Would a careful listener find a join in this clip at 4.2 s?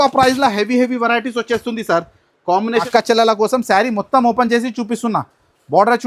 no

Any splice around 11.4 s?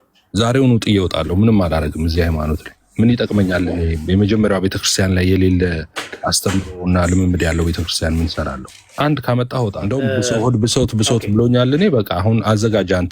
no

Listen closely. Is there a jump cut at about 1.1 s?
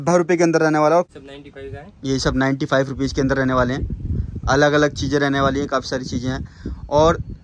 yes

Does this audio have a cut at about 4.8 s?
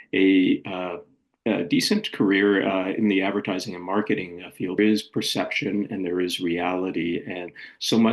yes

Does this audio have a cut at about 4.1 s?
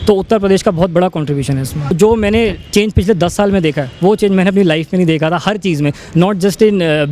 no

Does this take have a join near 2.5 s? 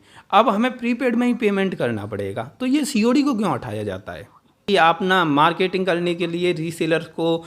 no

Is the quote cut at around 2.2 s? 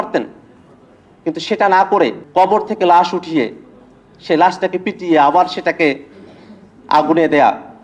yes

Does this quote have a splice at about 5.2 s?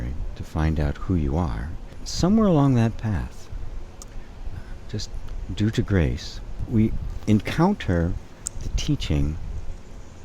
no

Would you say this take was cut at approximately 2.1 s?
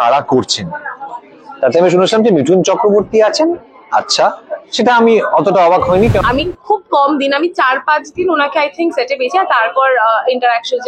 no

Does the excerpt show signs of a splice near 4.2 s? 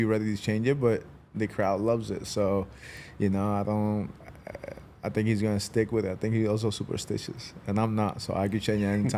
no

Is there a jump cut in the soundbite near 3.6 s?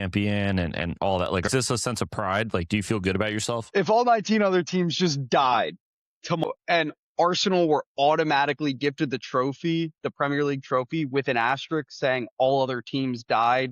yes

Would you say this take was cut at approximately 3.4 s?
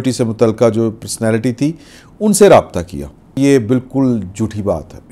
yes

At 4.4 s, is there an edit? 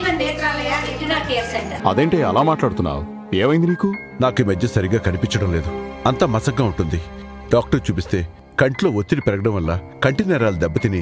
no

